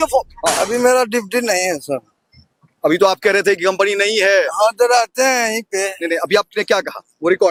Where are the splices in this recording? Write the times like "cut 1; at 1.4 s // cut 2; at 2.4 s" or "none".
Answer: none

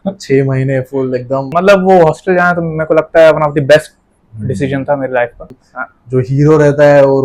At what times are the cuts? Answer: cut 1; at 1.5 s // cut 2; at 5.6 s

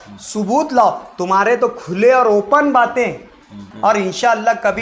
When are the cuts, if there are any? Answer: cut 1; at 3.7 s

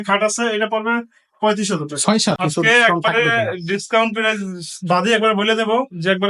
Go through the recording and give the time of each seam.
cut 1; at 2.4 s

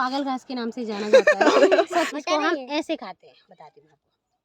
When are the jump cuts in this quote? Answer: cut 1; at 2.1 s

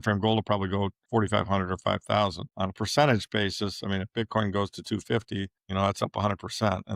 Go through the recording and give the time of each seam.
cut 1; at 1.0 s // cut 2; at 5.6 s

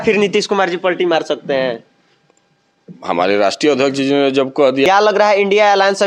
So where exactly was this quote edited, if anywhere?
cut 1; at 4.8 s

